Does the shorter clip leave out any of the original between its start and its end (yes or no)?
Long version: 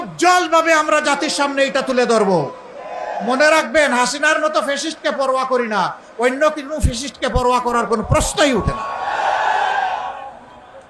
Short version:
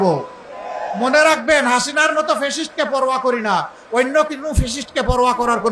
no